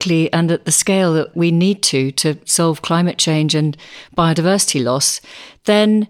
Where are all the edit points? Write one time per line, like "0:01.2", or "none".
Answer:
0:01.3